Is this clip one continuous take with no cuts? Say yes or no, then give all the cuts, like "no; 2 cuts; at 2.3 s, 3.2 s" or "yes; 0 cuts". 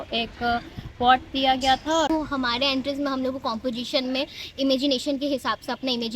no; 1 cut; at 2.1 s